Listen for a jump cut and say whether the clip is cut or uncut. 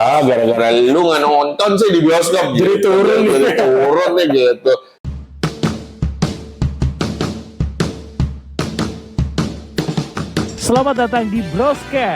cut